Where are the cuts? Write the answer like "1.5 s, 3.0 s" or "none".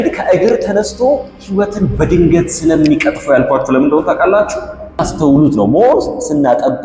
5.1 s